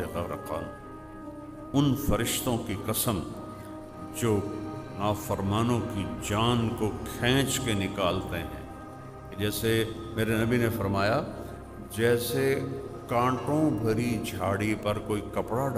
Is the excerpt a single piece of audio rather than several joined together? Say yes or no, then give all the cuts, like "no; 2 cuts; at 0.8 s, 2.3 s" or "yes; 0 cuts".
yes; 0 cuts